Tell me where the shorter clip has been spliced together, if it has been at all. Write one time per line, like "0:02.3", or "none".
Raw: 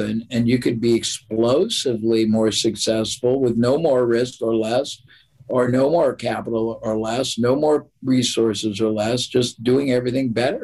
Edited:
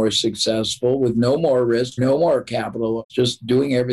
0:02.0
0:03.1